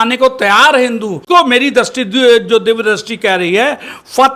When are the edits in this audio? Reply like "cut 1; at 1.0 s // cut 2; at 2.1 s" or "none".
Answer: cut 1; at 1.2 s